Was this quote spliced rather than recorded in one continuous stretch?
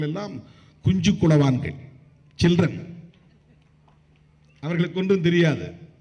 no; 0 cuts

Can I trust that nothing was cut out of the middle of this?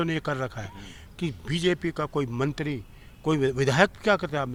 yes; 0 cuts

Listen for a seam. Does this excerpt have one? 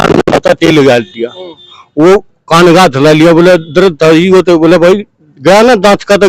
no; 0 cuts

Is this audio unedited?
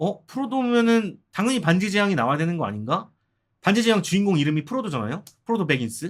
yes; 0 cuts

